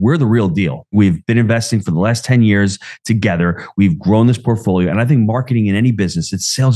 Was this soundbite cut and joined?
yes; 1 cut; at 0.9 s

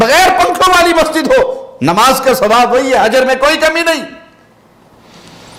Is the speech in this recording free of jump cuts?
yes; 0 cuts

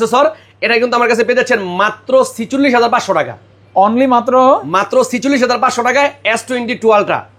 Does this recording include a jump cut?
no; 0 cuts

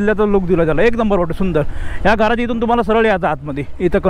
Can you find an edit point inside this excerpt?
no; 0 cuts

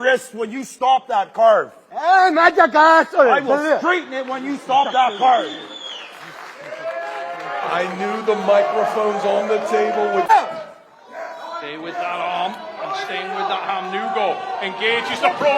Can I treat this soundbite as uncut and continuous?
no; 1 cut; at 10.3 s

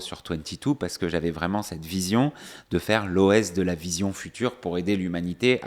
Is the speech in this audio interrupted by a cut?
no; 0 cuts

